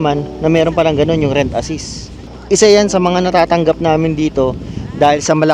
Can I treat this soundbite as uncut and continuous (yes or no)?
no